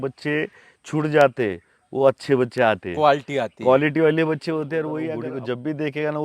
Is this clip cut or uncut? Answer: cut